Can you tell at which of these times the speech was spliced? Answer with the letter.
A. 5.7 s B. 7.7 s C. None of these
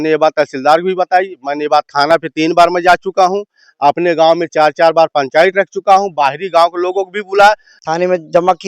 B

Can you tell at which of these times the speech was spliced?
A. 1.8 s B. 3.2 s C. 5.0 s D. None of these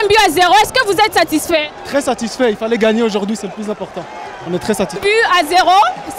C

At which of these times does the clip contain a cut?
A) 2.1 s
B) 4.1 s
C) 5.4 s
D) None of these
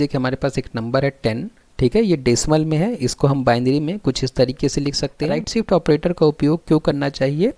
C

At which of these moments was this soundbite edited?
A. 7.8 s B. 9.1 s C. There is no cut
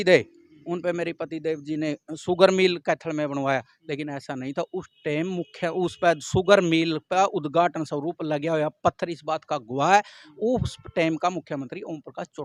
C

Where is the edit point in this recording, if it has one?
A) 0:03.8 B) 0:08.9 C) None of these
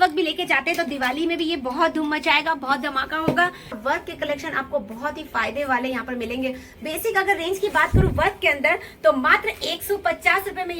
A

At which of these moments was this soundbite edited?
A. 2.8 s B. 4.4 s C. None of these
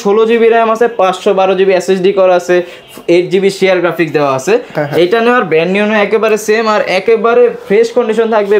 C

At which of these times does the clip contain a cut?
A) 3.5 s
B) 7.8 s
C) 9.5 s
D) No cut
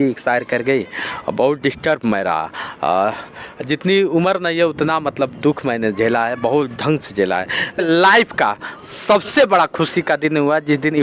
B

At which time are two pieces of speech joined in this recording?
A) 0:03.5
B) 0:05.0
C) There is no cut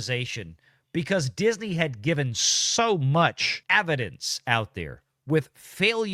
A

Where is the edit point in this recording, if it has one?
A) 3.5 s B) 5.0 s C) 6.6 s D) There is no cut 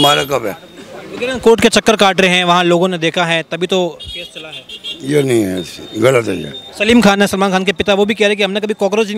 D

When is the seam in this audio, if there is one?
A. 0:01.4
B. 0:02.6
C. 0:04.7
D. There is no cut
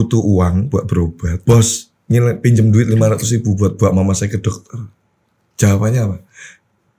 A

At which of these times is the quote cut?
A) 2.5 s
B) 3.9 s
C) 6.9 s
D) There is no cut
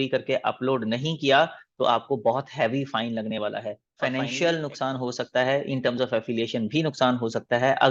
B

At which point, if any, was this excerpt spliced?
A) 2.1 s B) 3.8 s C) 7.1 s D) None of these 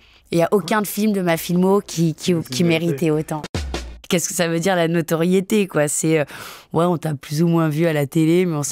B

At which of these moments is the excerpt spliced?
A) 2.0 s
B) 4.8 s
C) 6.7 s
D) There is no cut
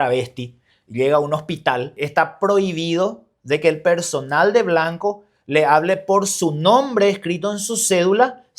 A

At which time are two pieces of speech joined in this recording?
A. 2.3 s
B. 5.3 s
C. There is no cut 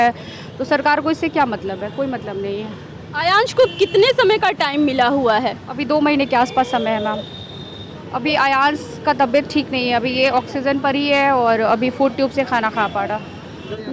C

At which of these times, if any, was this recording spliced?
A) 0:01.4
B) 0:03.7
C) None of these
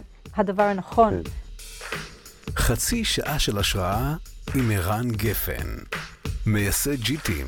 A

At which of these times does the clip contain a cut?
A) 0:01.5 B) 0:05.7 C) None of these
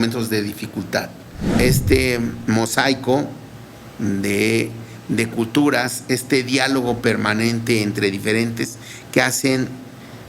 A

